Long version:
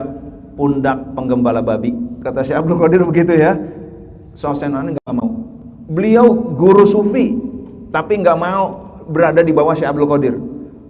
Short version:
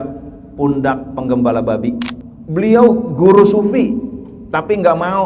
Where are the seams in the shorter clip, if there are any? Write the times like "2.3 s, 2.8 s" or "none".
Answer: 2.2 s

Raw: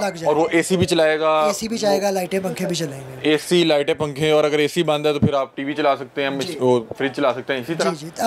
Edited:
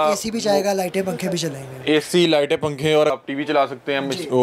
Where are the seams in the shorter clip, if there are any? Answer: 3.1 s

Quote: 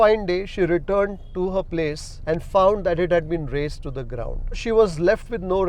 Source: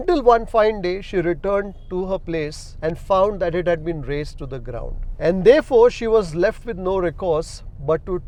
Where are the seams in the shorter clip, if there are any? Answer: 4.6 s

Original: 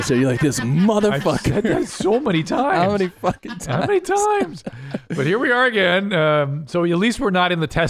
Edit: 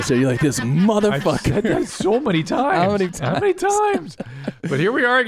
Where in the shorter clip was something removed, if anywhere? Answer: 3.2 s

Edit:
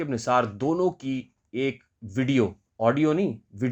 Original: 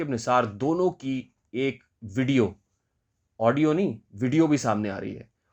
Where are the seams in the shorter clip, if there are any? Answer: 2.6 s

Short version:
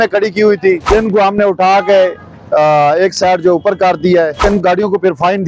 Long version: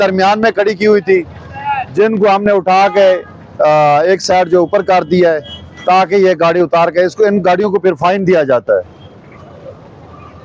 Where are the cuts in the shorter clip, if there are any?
0.8 s, 4.5 s

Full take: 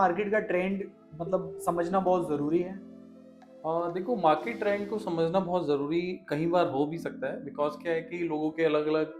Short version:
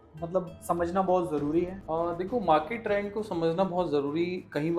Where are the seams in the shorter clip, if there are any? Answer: 1.8 s

